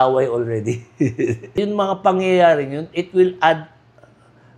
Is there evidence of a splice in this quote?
yes; 1 cut; at 1.5 s

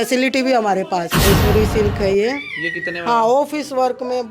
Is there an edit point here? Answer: yes; 1 cut; at 1.2 s

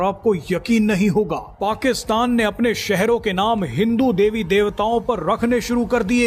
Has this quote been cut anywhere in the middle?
no; 0 cuts

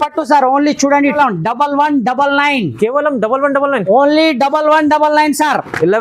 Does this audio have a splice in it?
yes; 1 cut; at 1.1 s

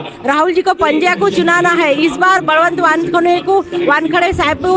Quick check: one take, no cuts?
yes; 0 cuts

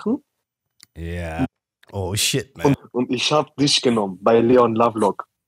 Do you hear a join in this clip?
yes; 1 cut; at 2.8 s

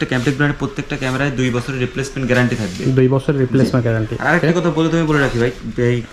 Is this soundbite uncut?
yes; 0 cuts

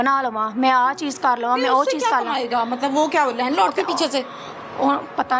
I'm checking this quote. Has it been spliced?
no; 0 cuts

